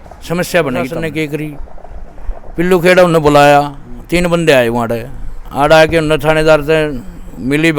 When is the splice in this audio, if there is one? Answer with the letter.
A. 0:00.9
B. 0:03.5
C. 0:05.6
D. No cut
A